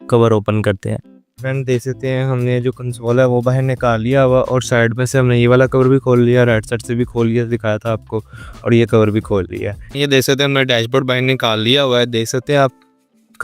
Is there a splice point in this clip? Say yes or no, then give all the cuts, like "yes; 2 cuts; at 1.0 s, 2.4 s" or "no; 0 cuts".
yes; 2 cuts; at 1.4 s, 9.8 s